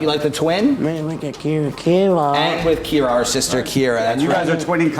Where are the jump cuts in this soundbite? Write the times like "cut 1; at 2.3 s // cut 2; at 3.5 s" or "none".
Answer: none